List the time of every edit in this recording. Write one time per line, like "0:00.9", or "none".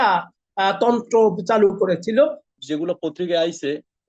0:02.5